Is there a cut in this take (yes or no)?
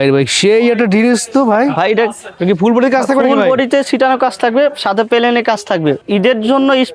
yes